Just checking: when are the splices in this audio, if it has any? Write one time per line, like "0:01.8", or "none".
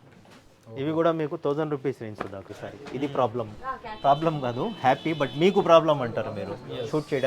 0:02.5